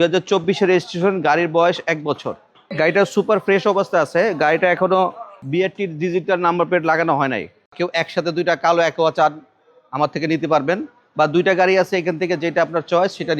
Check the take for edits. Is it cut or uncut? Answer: cut